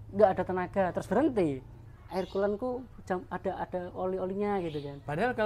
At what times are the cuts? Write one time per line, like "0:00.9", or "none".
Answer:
0:01.9